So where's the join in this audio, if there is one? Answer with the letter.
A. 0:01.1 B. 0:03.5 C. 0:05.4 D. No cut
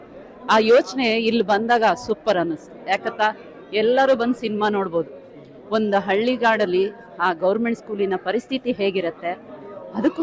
D